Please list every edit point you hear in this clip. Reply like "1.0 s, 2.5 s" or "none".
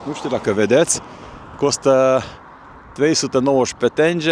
none